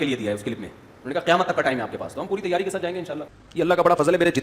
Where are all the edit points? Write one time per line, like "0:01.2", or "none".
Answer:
0:03.2